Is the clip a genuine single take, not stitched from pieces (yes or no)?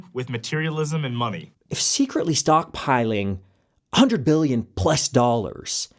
no